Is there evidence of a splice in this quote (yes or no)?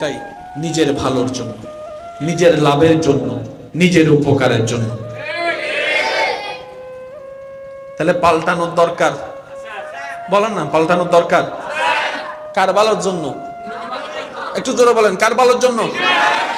no